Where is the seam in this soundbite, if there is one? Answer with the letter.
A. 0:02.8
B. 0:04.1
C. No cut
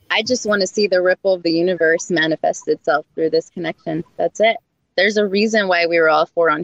C